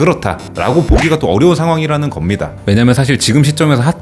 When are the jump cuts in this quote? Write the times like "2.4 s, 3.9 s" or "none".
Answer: 2.5 s